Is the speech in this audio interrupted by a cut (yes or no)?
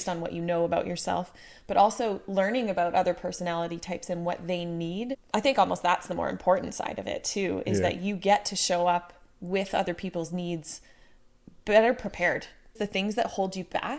yes